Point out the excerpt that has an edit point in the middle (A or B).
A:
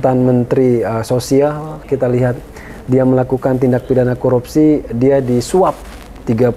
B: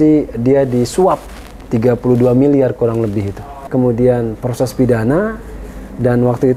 B